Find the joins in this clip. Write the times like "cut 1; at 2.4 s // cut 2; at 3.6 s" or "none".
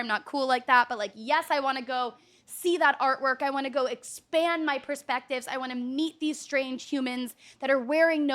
none